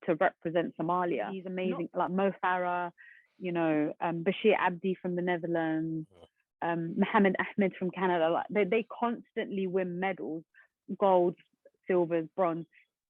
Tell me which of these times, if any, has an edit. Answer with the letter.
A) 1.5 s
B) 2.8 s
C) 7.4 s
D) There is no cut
A